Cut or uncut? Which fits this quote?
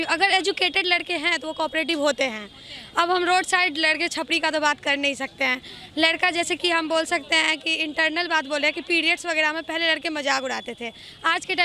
uncut